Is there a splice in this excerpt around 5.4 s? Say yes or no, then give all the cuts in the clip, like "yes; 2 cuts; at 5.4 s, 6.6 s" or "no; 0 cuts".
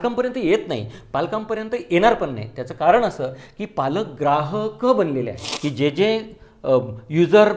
yes; 1 cut; at 5.4 s